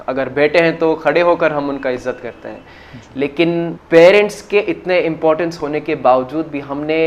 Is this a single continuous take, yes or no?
no